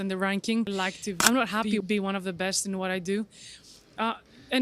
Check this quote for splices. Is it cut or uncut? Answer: cut